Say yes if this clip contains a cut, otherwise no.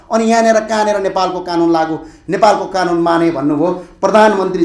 no